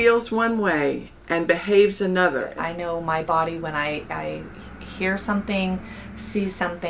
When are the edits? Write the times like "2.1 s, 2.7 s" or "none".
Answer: 2.5 s